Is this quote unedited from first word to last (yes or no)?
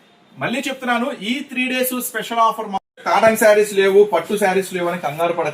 no